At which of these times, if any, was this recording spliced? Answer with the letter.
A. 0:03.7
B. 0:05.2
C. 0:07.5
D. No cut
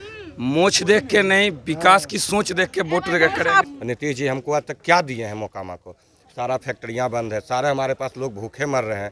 A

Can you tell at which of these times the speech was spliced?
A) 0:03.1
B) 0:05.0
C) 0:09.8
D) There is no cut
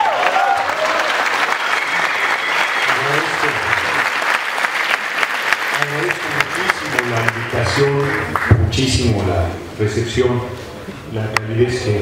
A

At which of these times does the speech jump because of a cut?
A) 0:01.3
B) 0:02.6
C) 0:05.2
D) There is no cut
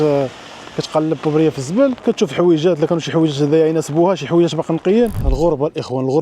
C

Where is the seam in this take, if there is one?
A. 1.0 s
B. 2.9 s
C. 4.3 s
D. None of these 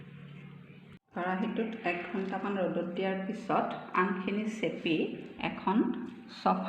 A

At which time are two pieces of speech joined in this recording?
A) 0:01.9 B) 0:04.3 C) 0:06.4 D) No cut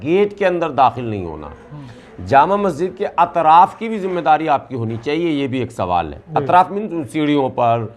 D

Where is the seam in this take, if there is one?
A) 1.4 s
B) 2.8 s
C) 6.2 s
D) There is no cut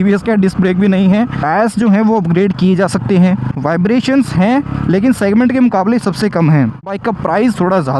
D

